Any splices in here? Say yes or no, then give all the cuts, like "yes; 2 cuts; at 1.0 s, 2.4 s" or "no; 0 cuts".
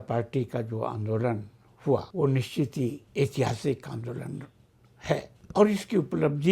yes; 3 cuts; at 2.1 s, 3.0 s, 5.4 s